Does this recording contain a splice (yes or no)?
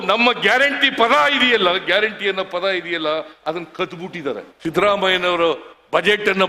yes